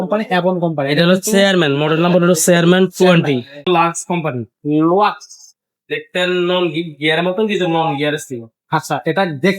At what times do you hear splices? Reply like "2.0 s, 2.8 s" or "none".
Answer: 3.6 s